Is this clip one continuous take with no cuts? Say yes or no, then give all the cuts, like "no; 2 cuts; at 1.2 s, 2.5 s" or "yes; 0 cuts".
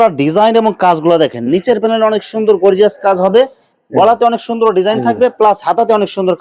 yes; 0 cuts